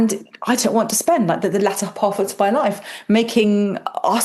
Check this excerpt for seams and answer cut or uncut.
uncut